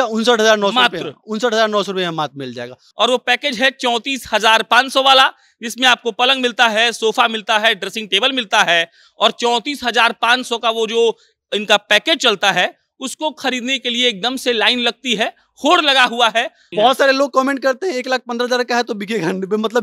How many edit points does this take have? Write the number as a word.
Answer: two